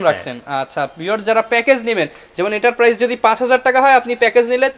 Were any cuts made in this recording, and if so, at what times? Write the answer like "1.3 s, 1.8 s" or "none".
none